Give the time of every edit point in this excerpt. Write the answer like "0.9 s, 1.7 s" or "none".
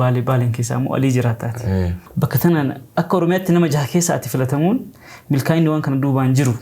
2.0 s